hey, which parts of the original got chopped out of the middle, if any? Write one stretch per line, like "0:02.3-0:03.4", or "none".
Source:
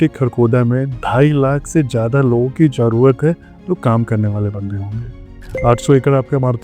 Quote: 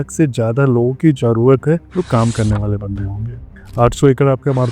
0:03.4-0:03.6
0:05.3-0:05.4

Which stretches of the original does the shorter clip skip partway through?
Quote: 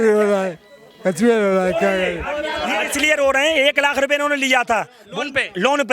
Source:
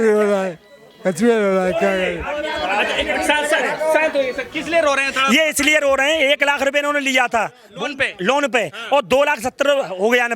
0:02.9-0:05.5

